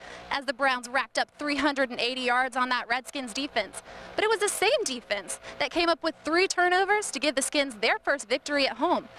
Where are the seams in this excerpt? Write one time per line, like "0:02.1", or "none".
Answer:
none